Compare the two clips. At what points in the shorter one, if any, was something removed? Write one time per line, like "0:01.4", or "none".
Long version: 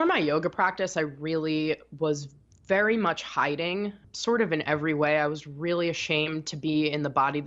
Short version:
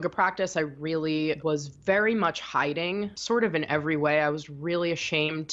0:01.5
0:03.2